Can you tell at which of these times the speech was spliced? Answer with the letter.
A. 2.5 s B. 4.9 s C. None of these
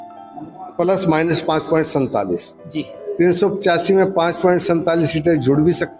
C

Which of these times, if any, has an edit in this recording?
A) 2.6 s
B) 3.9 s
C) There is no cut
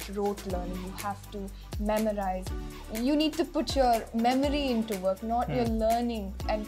A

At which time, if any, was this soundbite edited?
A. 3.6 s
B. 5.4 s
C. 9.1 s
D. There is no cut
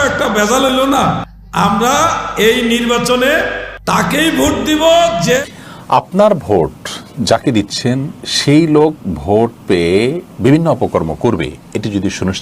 B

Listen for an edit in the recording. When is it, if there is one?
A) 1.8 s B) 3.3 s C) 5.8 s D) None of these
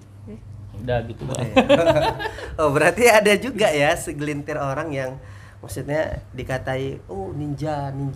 D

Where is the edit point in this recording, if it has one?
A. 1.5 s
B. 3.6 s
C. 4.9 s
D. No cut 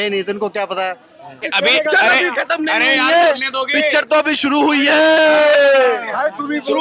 A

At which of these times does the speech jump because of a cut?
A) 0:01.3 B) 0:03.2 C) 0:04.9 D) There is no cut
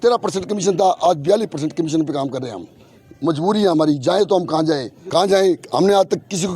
C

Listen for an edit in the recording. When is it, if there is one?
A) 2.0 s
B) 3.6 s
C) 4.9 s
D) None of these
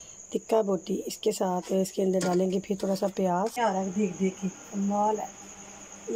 B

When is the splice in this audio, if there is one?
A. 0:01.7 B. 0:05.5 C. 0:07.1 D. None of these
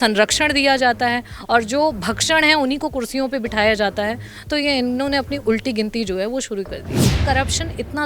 C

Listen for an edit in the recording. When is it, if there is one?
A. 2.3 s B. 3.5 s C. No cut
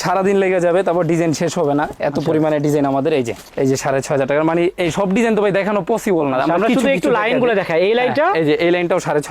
B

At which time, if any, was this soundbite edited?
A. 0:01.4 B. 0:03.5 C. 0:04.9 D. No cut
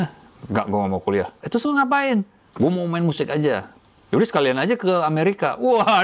A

